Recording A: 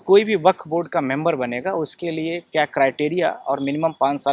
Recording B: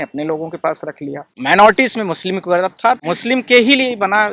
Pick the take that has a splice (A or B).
B